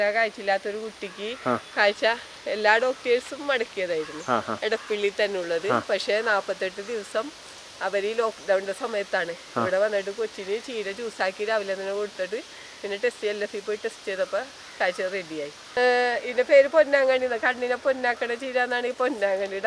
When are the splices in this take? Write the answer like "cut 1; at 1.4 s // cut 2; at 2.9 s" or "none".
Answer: cut 1; at 15.8 s